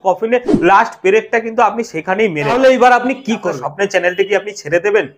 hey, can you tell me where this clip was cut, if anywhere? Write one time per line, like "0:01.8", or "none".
0:02.5
0:03.5